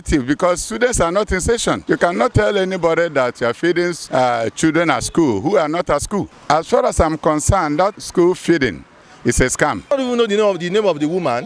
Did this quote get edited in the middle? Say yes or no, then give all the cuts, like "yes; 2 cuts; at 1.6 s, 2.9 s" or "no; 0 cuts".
yes; 5 cuts; at 2.3 s, 4.0 s, 6.3 s, 7.9 s, 9.9 s